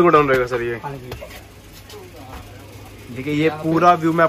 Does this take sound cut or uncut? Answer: uncut